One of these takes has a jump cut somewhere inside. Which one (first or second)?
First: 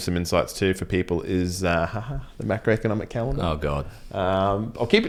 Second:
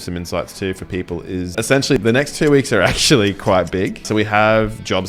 second